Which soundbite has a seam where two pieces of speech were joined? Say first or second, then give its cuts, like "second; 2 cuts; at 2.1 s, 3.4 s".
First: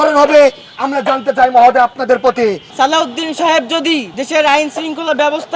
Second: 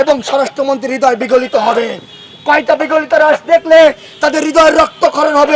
first; 2 cuts; at 2.6 s, 4.1 s